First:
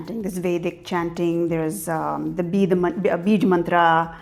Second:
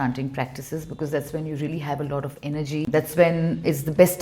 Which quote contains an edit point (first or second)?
second